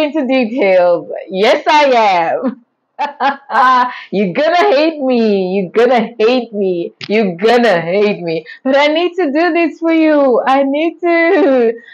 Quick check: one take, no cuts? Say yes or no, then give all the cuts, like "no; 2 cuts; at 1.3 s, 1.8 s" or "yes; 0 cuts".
yes; 0 cuts